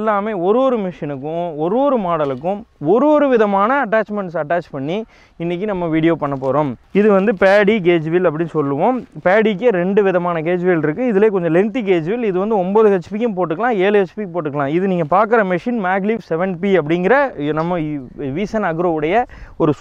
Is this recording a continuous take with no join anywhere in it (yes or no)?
no